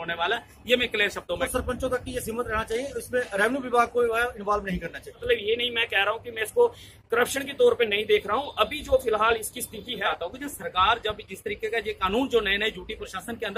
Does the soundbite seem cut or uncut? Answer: cut